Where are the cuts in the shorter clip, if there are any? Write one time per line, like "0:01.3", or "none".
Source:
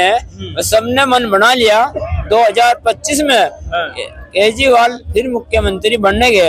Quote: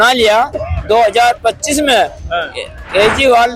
none